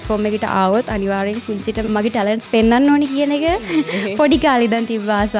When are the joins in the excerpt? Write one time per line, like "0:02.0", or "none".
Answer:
0:01.9